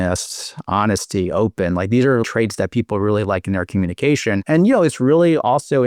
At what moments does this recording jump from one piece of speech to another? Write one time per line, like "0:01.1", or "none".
0:02.2
0:04.4